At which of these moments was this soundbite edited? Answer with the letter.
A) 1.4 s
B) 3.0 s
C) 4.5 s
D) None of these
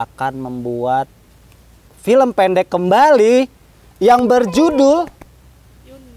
D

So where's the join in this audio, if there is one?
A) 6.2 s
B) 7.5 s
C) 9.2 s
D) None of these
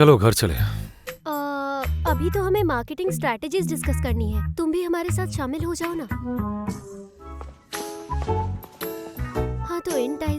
B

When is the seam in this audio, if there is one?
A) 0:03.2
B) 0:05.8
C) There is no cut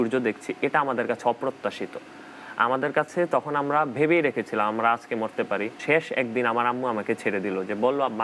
B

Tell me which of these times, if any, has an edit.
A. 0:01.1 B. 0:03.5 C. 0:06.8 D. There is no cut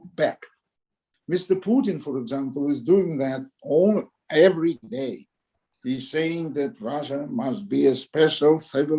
A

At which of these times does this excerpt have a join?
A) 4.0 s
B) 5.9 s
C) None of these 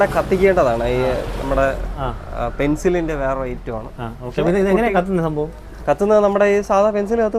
C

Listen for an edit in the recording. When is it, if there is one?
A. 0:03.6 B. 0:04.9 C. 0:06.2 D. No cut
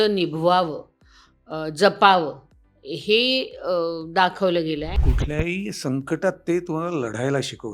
B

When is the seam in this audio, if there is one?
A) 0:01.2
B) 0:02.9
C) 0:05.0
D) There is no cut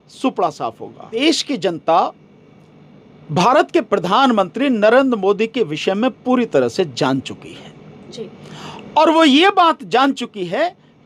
A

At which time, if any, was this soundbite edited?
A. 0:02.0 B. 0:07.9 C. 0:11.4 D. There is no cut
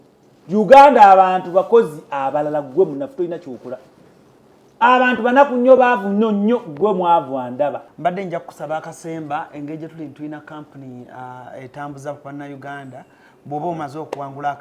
B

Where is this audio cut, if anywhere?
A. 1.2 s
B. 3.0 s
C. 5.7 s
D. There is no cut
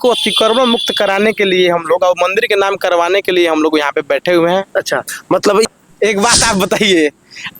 C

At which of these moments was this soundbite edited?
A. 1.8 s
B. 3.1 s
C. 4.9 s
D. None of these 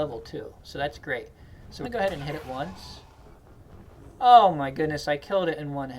A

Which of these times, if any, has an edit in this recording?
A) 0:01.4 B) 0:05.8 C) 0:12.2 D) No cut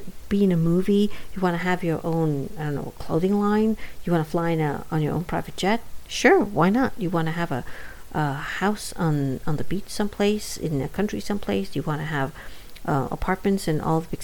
D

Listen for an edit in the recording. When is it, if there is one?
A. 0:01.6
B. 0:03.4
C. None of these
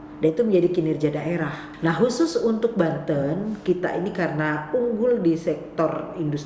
A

